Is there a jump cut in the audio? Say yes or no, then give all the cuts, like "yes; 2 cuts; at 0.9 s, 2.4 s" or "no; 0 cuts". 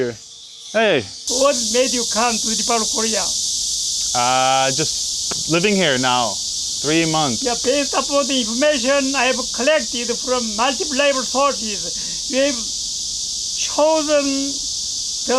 yes; 1 cut; at 1.2 s